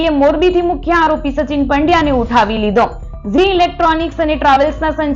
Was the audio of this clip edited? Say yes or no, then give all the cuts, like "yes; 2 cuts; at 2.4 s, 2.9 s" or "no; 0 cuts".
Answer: no; 0 cuts